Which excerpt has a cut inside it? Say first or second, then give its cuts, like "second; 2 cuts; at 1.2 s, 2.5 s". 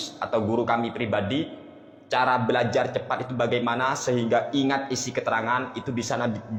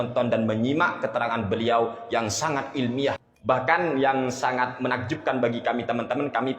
second; 1 cut; at 3.2 s